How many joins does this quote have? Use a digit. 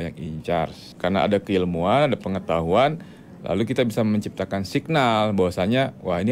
1